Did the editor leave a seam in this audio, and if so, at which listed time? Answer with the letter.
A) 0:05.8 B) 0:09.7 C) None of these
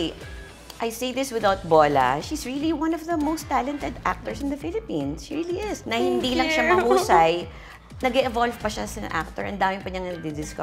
A